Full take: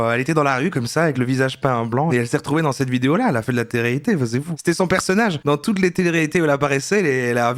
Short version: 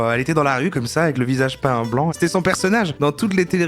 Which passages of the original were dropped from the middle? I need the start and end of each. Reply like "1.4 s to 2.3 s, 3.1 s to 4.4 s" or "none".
2.1 s to 4.6 s